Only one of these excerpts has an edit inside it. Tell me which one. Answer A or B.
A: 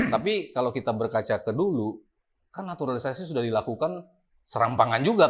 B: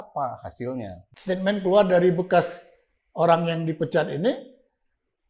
B